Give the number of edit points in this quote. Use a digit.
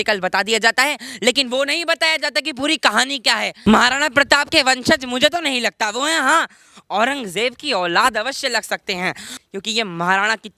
2